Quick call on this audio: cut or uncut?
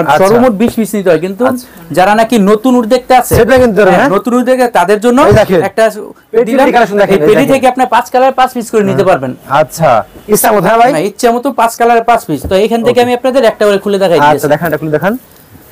uncut